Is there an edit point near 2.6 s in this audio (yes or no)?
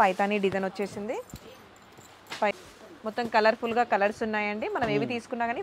yes